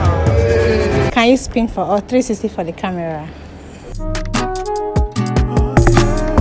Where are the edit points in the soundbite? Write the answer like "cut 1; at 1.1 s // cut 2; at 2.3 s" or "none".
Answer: cut 1; at 1.1 s